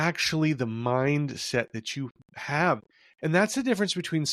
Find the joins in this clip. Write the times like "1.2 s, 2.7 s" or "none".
2.9 s